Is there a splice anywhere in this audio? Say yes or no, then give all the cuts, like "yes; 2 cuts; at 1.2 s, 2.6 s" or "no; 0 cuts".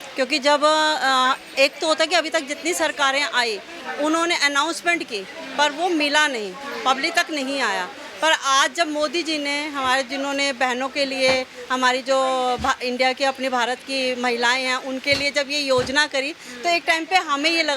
no; 0 cuts